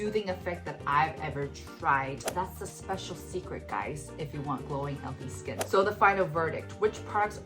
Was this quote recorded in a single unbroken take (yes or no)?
no